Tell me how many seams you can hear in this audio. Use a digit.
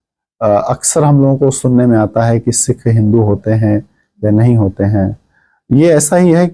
0